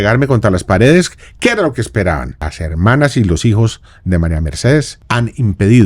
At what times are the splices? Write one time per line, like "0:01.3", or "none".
0:02.6
0:05.0